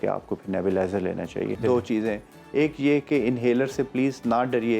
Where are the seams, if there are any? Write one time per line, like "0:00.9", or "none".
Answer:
0:01.6

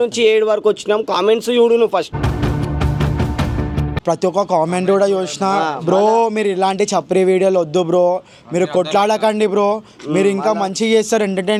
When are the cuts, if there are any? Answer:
none

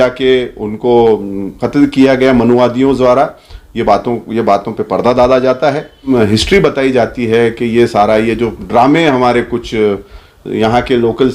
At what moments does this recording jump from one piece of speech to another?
0:06.1

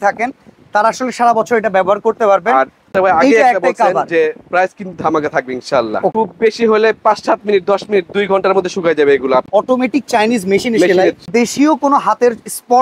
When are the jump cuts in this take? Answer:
0:02.9
0:06.1
0:09.5
0:11.3

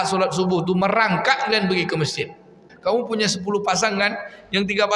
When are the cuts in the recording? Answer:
0:02.7

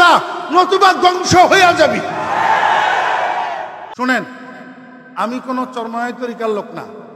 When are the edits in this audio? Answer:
0:03.9

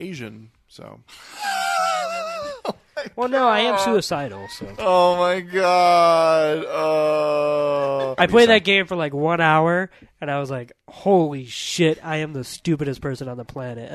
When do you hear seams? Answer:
0:08.1

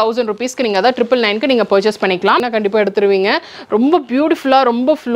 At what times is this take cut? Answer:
0:02.4

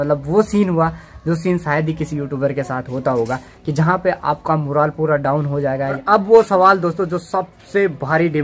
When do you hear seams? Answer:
0:06.0

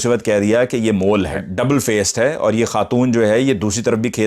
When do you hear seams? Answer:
0:01.4

